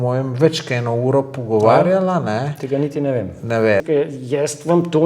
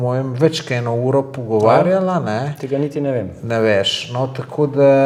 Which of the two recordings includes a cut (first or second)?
first